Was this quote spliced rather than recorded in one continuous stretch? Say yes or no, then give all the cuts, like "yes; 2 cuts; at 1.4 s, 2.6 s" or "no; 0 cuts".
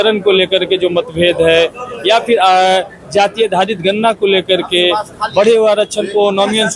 no; 0 cuts